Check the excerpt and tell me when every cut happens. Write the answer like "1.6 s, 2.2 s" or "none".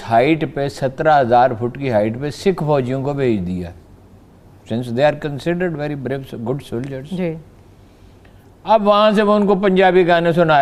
none